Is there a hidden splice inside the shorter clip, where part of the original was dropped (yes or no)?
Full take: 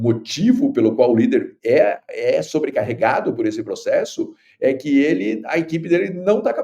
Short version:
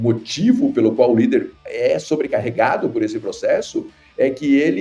yes